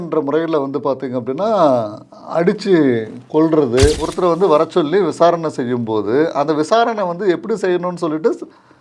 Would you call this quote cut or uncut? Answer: cut